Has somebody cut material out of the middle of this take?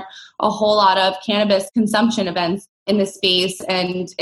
yes; 2 cuts; at 1.7 s, 2.7 s

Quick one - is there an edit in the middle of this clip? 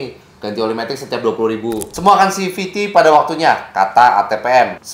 yes; 1 cut; at 1.9 s

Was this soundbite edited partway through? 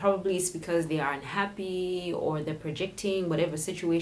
no; 0 cuts

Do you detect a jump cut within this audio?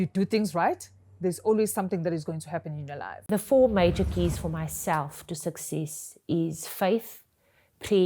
yes; 1 cut; at 3.1 s

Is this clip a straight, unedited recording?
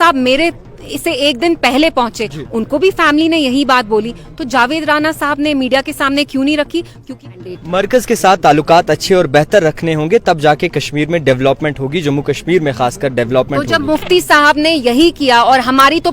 no; 1 cut; at 7.2 s

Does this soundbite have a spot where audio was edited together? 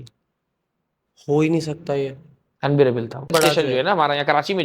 yes; 1 cut; at 3.3 s

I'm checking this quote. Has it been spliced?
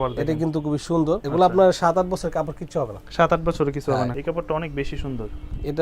yes; 2 cuts; at 1.2 s, 4.1 s

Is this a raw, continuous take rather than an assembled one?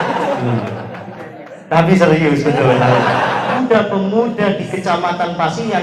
no; 1 cut; at 3.6 s

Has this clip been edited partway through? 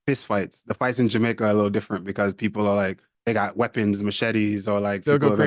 yes; 1 cut; at 3.1 s

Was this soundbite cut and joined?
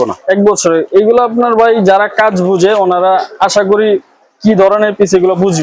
no; 0 cuts

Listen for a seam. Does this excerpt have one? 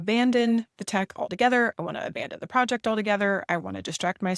no; 0 cuts

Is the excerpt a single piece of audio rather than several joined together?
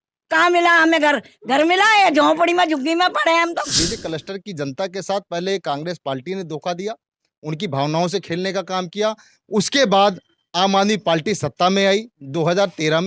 no; 1 cut; at 3.7 s

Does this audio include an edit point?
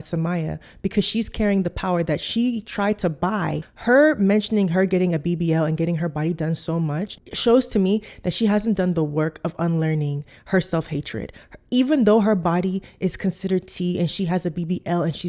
yes; 1 cut; at 3.7 s

